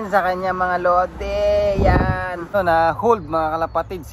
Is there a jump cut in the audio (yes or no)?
yes